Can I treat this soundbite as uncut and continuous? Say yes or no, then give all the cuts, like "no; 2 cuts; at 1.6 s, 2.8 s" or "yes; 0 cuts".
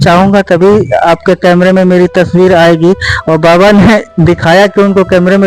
yes; 0 cuts